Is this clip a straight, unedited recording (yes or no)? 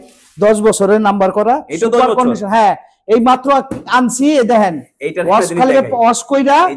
yes